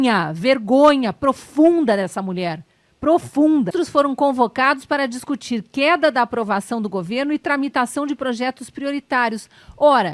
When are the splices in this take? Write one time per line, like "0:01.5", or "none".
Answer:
none